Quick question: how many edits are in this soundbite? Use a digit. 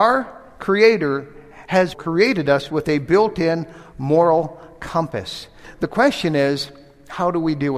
1